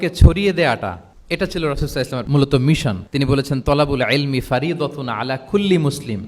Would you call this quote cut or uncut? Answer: cut